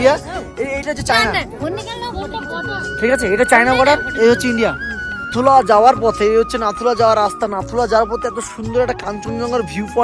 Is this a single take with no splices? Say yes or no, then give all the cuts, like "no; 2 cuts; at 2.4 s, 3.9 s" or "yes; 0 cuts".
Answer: no; 1 cut; at 5.3 s